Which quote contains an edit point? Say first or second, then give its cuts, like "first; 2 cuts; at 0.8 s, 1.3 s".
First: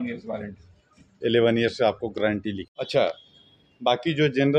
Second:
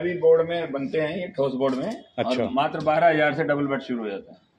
first; 1 cut; at 2.7 s